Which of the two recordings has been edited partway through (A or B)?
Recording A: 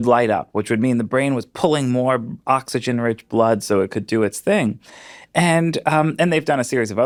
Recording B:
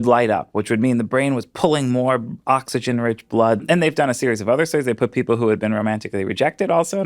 B